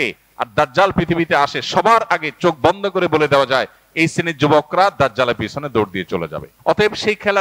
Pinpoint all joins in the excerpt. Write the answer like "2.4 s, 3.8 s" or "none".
6.5 s